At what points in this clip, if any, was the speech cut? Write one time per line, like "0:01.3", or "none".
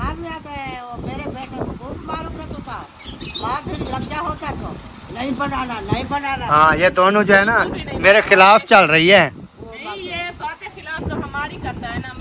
none

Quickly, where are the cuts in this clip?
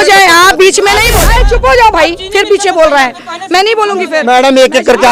0:01.2

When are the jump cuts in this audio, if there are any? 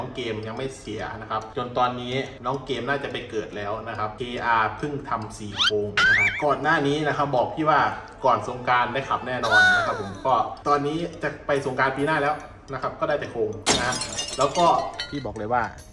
0:01.5
0:06.3
0:15.1

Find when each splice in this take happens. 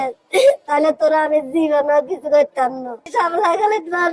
0:03.0

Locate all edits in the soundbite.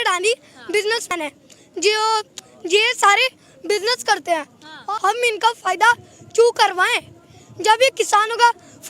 0:01.1
0:04.7

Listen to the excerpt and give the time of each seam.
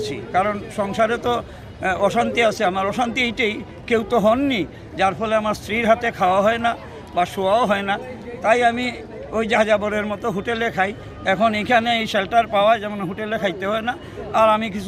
none

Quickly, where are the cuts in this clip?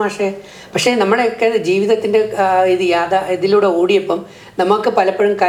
none

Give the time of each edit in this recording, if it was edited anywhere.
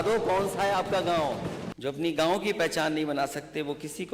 0:01.7

